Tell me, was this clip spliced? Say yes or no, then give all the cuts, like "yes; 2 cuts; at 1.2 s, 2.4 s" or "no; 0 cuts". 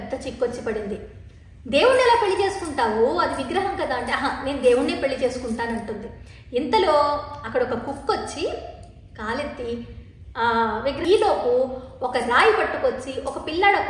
yes; 1 cut; at 11.0 s